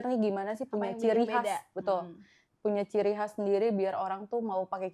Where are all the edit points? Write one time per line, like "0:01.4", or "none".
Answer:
none